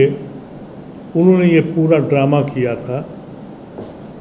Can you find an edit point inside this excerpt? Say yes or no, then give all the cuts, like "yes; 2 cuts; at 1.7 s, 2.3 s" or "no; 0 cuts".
no; 0 cuts